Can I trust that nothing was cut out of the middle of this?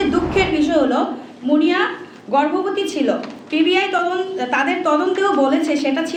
yes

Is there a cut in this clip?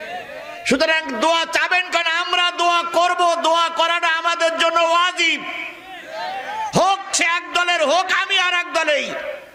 no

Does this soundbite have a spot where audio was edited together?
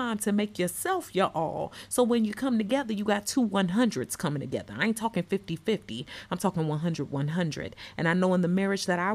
no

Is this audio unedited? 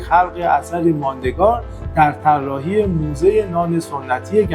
yes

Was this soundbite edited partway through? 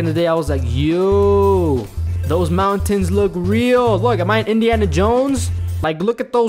no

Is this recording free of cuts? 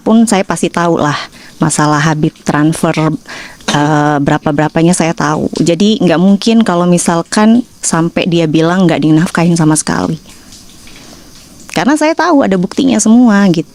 yes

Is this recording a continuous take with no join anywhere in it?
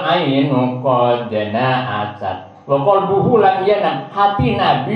yes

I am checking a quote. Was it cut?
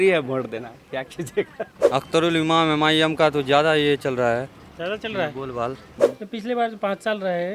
yes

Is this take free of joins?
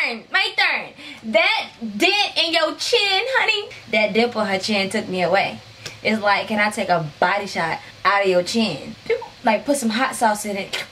no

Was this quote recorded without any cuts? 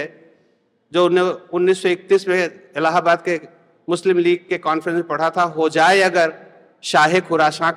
yes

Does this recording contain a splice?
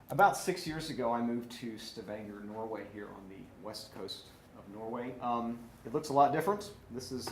yes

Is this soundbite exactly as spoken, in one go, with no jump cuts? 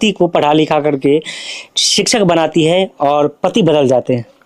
yes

